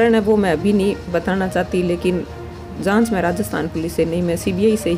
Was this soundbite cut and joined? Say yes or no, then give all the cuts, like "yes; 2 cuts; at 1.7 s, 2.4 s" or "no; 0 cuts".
no; 0 cuts